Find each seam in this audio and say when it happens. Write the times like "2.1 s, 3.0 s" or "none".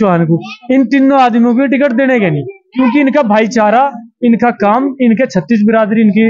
none

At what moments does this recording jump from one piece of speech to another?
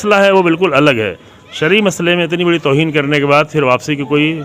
none

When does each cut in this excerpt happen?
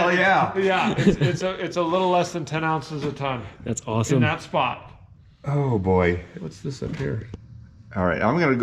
7.3 s

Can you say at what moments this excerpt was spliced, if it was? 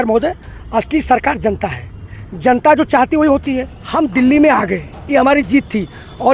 3.7 s

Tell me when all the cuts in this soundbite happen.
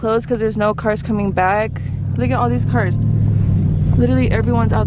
none

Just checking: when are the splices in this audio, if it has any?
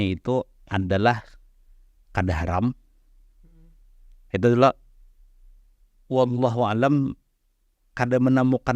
none

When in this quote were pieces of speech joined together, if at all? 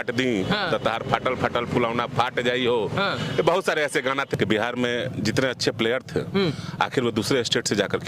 4.3 s

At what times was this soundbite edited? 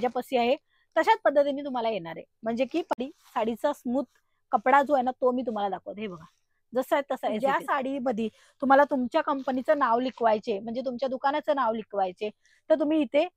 2.9 s, 7.4 s

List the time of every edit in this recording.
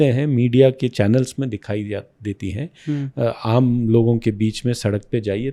none

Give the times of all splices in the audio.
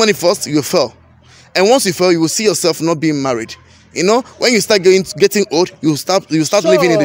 none

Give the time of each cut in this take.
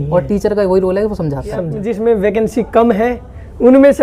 1.8 s

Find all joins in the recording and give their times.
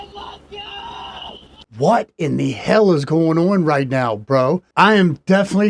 1.8 s, 4.7 s

